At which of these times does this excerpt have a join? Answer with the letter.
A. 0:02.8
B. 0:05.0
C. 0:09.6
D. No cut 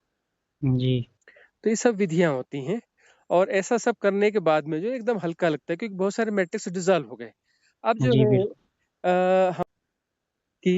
C